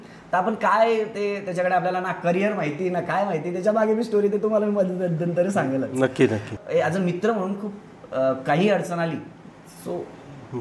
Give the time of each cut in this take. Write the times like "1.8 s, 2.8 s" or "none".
6.5 s